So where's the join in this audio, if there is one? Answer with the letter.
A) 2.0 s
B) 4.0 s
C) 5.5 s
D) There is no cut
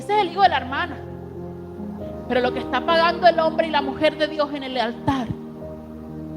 A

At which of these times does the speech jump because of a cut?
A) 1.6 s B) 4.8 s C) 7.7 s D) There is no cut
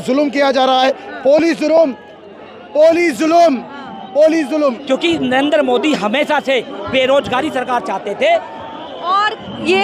B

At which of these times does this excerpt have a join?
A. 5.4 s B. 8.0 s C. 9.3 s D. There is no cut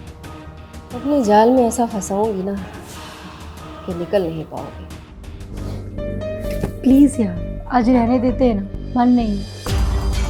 A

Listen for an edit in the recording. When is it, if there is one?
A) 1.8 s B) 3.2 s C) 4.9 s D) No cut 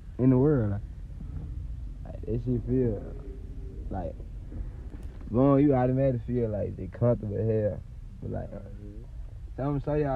C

